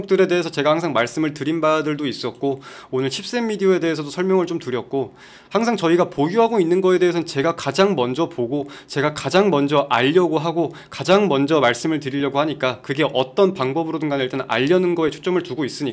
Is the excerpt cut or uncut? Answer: uncut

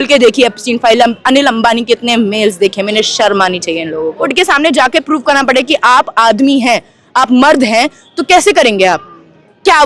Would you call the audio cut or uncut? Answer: cut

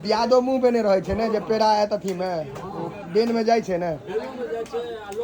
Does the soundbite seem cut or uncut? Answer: uncut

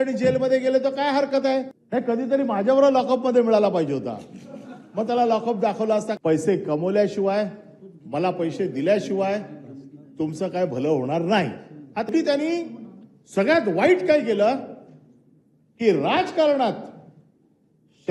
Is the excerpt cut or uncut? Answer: cut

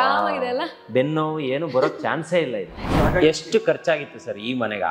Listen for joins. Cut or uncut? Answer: cut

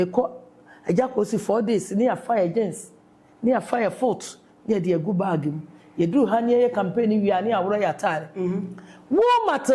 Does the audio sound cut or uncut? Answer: uncut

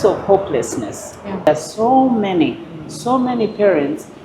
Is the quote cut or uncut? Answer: cut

